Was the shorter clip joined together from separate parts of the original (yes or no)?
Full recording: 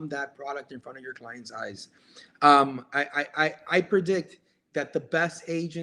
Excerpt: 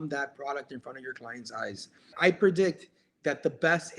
yes